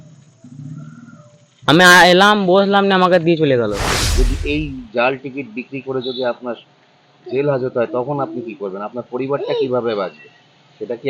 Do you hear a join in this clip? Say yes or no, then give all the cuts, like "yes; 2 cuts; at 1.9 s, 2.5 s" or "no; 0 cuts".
yes; 1 cut; at 4.0 s